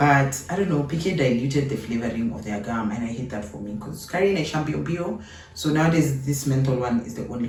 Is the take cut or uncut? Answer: uncut